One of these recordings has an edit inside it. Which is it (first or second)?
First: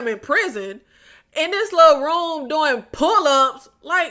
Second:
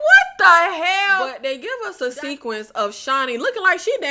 second